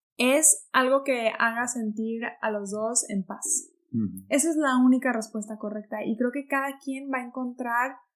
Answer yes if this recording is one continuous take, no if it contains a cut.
yes